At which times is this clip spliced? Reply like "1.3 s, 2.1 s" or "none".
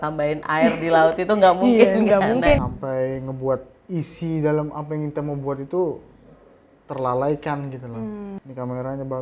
2.6 s, 8.4 s